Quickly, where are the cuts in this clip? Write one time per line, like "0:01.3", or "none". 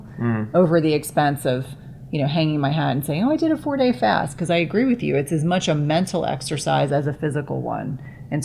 none